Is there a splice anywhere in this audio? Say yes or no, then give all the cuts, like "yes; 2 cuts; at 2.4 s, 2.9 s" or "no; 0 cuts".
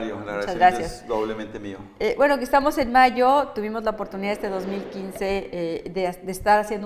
yes; 1 cut; at 5.5 s